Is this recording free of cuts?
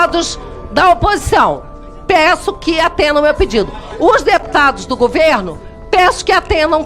yes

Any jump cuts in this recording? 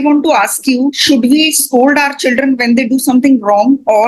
yes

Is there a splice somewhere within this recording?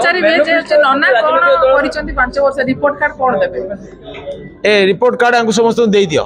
no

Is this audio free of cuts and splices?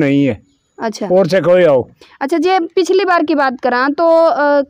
yes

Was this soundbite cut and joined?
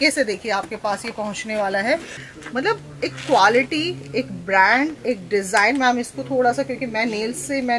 yes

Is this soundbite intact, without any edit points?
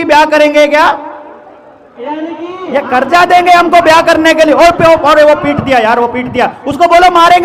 yes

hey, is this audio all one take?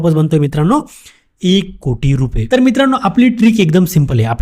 no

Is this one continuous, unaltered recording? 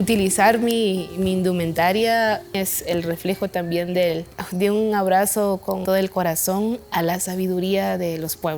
no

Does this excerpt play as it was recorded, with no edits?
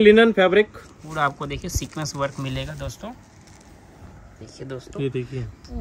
no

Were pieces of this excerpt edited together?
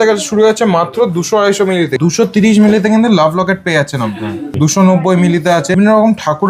yes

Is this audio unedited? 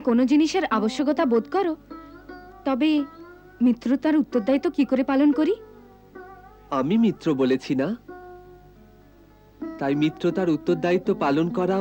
yes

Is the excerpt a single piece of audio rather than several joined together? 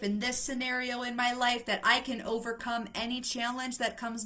yes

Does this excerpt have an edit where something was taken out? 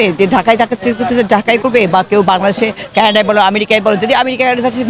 no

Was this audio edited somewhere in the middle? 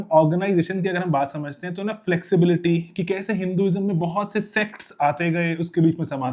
no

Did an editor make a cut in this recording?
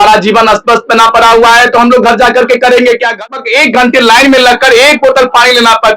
yes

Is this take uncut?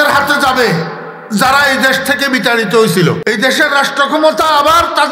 no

